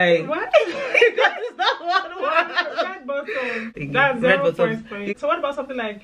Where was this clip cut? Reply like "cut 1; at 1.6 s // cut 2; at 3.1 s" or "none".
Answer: cut 1; at 3.7 s // cut 2; at 5.1 s